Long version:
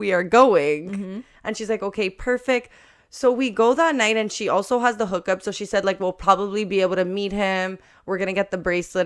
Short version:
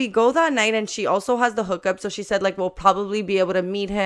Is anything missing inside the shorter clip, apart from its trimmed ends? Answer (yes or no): no